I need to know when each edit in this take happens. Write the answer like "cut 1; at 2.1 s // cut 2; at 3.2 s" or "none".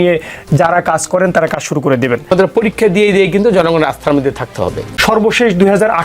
cut 1; at 2.3 s // cut 2; at 4.8 s